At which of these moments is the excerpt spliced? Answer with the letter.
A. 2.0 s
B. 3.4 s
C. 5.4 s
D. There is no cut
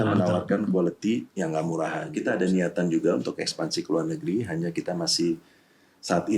A